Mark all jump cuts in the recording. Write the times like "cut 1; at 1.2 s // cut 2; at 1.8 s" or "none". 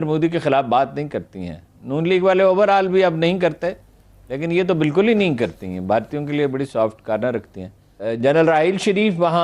cut 1; at 8.0 s